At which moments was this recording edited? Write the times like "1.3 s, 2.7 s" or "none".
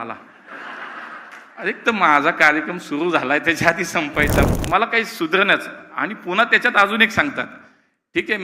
4.5 s